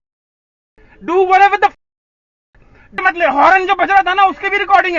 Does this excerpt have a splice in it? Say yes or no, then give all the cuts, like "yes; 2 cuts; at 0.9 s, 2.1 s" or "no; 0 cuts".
no; 0 cuts